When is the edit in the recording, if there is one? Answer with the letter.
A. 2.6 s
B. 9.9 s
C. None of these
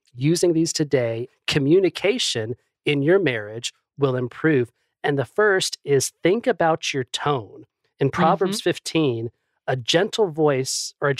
C